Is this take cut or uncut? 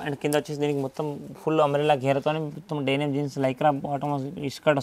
uncut